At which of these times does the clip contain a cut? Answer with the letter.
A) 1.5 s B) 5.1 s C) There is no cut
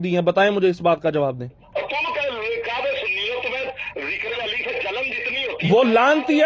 A